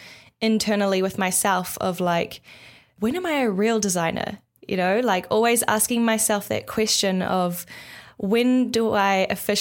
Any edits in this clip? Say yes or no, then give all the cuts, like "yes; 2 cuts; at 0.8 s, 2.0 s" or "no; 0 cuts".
yes; 1 cut; at 2.9 s